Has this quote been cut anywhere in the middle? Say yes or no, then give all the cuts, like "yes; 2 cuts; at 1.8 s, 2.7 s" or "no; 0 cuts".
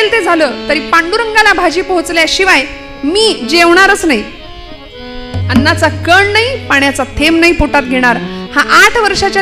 no; 0 cuts